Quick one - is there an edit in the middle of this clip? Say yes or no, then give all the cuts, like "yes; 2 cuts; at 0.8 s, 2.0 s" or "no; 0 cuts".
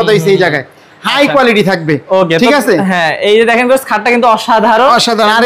no; 0 cuts